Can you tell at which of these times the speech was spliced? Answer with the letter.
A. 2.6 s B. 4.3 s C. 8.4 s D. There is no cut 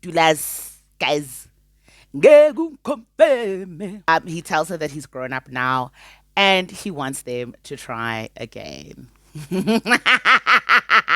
B